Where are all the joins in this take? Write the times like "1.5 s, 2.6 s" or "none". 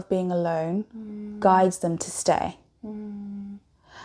none